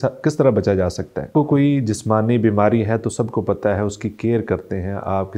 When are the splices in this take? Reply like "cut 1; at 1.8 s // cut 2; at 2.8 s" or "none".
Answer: cut 1; at 1.3 s